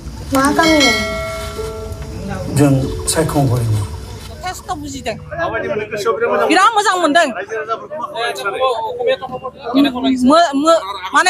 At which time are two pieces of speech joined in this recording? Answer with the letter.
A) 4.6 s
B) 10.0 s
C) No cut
A